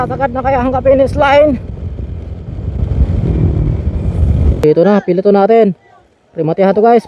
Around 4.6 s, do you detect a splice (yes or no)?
yes